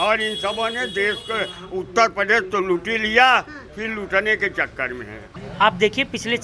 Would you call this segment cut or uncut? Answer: cut